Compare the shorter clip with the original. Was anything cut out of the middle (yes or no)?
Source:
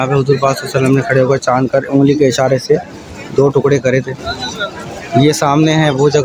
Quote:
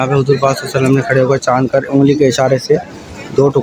no